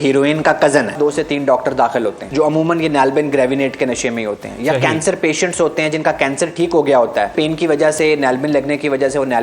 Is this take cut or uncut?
cut